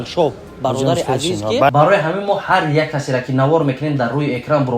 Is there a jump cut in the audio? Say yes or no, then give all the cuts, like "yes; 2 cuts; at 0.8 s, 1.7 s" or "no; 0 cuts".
yes; 1 cut; at 1.7 s